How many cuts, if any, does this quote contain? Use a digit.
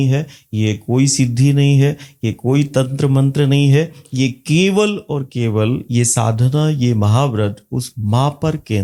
0